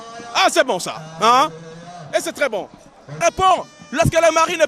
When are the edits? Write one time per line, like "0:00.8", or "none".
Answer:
0:03.1